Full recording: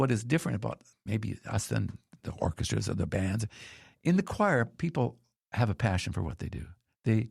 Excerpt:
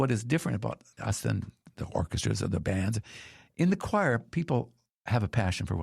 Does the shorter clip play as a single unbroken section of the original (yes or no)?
no